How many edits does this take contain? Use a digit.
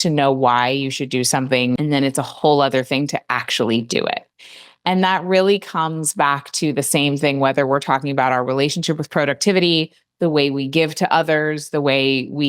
1